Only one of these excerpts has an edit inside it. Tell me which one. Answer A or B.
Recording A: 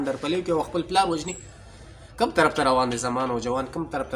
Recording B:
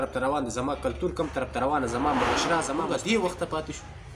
B